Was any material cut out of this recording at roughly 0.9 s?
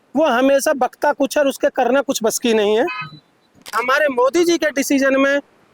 no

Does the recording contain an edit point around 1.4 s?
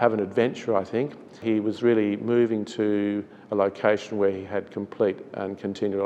yes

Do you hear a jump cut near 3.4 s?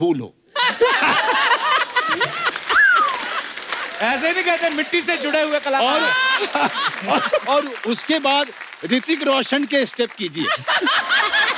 no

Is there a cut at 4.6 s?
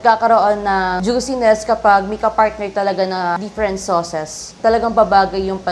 yes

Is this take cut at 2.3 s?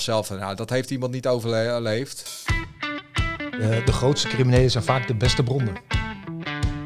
yes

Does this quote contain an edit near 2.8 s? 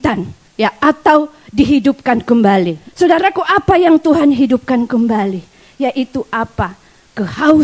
yes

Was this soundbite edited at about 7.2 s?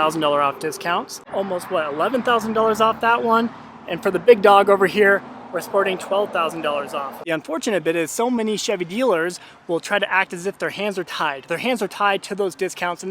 yes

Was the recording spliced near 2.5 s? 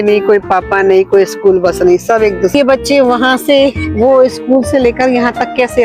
yes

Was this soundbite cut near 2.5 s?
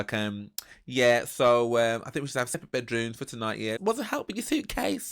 yes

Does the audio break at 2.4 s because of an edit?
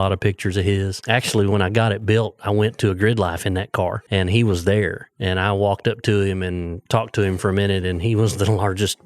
no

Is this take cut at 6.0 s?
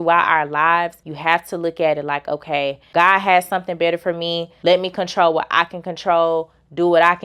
no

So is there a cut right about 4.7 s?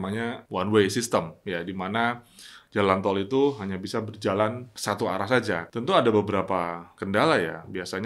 yes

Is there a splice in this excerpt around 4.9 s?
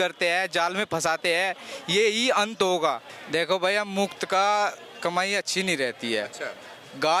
no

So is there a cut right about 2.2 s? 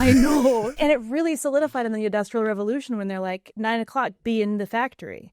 no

